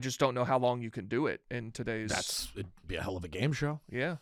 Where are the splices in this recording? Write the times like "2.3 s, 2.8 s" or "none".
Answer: none

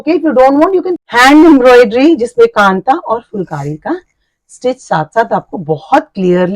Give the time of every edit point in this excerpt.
0.9 s

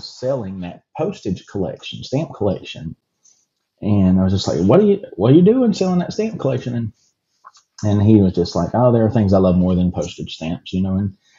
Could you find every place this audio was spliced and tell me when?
none

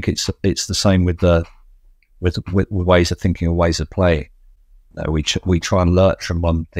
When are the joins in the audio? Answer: none

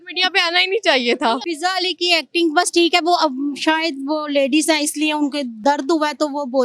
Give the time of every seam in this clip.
1.4 s, 5.6 s

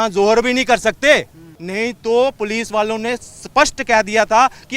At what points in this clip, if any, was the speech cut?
1.6 s

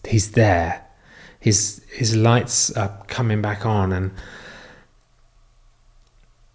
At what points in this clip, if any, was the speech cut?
none

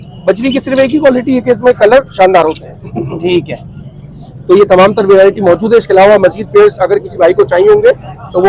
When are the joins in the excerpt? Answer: none

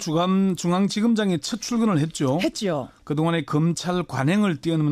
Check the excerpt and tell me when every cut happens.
2.2 s

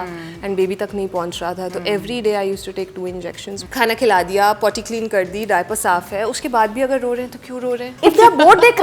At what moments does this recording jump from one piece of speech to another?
3.7 s, 7.9 s

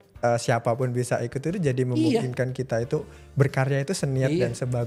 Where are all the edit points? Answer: none

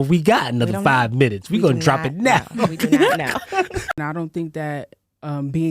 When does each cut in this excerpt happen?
3.9 s

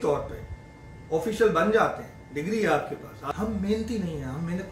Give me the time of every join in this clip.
3.2 s

